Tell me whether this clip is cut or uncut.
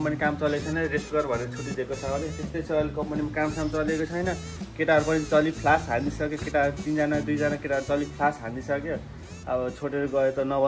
uncut